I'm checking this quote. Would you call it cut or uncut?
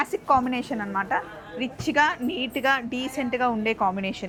uncut